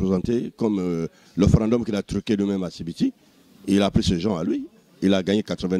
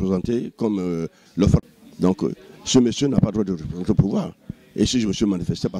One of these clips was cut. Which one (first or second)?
second